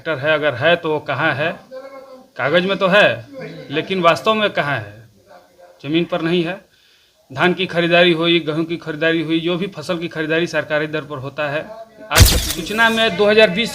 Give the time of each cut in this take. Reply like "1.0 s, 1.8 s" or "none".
12.4 s